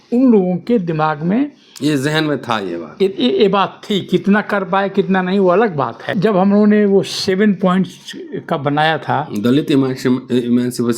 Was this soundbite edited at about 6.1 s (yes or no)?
yes